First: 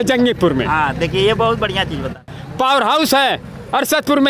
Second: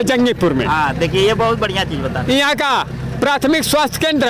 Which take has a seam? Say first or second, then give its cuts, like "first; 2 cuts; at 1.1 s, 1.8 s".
first; 1 cut; at 2.2 s